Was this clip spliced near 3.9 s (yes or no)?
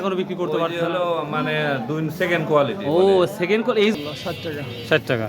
yes